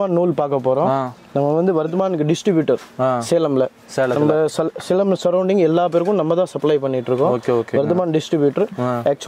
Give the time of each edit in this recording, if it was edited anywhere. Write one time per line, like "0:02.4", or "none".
none